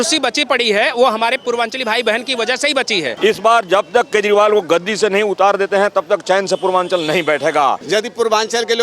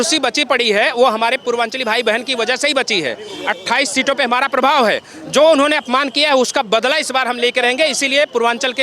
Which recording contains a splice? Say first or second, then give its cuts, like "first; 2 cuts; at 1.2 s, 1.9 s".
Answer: first; 2 cuts; at 3.1 s, 7.8 s